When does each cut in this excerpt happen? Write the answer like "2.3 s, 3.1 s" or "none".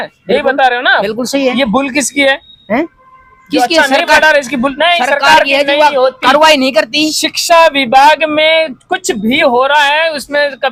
none